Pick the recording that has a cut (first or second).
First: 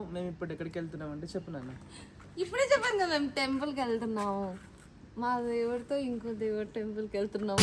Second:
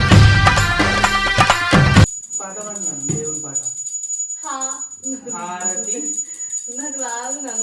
second